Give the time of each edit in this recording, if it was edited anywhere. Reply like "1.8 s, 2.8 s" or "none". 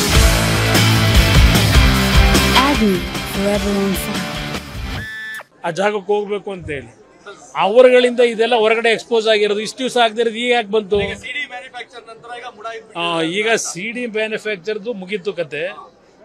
5.5 s